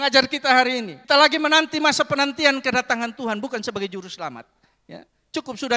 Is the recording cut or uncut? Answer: cut